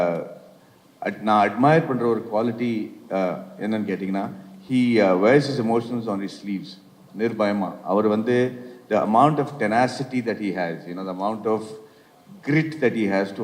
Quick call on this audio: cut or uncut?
uncut